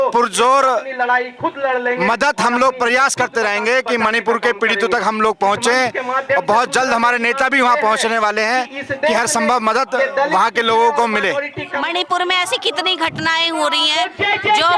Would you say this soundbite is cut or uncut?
cut